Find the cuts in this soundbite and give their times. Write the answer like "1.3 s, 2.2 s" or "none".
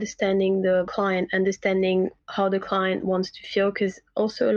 0.9 s, 2.2 s